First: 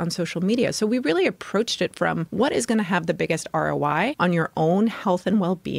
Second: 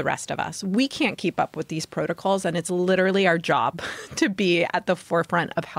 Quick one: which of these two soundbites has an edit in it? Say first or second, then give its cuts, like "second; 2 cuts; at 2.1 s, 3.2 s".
first; 2 cuts; at 2.3 s, 4.1 s